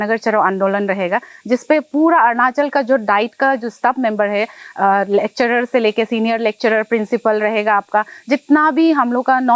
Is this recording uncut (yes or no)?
yes